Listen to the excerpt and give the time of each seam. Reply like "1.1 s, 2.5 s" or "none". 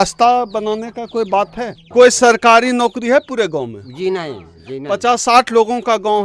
1.8 s